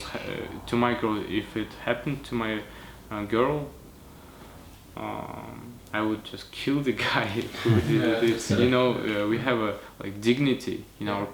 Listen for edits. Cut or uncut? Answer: uncut